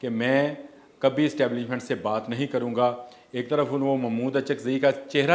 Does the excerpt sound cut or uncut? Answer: uncut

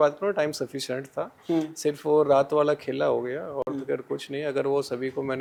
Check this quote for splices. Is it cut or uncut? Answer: uncut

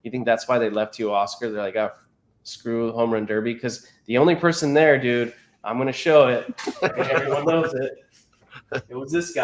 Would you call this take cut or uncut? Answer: uncut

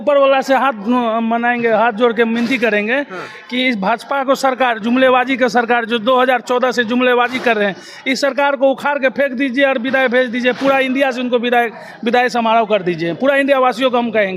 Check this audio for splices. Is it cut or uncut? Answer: uncut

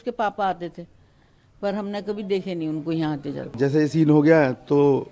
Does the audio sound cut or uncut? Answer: cut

